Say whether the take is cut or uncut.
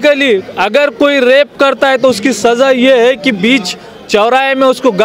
uncut